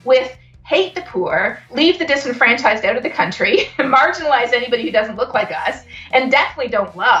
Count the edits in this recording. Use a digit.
1